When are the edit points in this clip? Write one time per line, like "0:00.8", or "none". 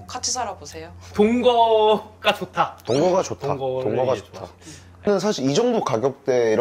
0:05.1

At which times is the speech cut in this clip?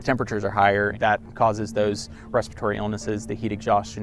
0:00.9

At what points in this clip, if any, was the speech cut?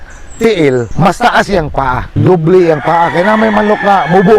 0:00.9
0:02.1

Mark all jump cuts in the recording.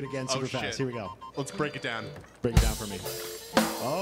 0:01.3

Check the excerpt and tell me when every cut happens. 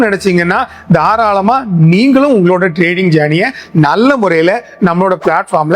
none

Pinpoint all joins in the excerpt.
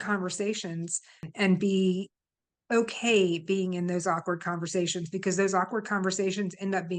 0:01.2

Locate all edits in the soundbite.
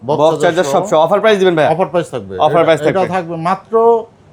none

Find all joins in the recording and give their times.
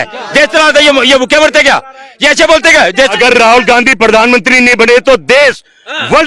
0:03.2

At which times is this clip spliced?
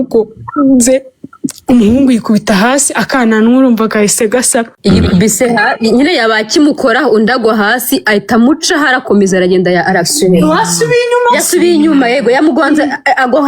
0:04.7

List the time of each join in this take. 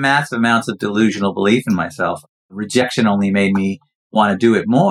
0:02.6

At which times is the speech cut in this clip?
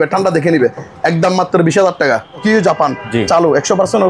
0:02.4

